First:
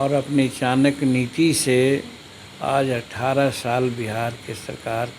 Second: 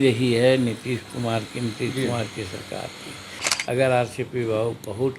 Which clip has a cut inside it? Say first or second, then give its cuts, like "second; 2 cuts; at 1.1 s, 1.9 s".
second; 1 cut; at 3.5 s